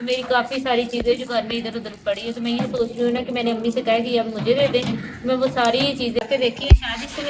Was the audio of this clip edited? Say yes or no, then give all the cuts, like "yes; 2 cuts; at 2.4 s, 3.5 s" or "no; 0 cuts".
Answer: yes; 1 cut; at 6.2 s